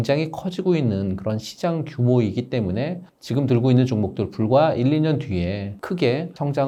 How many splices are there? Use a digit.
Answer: 0